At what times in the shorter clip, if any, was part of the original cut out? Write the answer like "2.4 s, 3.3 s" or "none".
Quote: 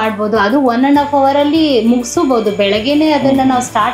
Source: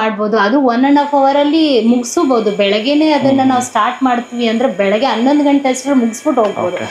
none